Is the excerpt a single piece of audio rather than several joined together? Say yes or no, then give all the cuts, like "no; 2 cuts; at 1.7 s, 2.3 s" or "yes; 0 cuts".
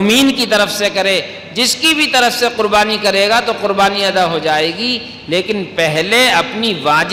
yes; 0 cuts